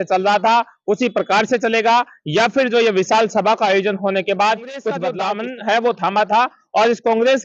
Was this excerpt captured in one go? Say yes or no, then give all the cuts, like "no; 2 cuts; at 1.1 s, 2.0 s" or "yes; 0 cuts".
no; 1 cut; at 5.1 s